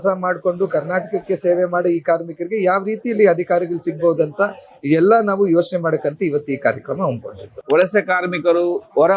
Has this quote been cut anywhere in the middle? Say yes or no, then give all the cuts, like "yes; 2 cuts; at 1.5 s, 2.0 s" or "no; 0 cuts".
no; 0 cuts